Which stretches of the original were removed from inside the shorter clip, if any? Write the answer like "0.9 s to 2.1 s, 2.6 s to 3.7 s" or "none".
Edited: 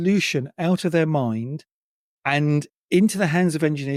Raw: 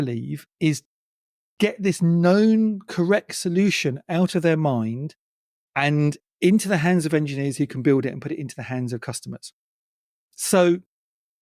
none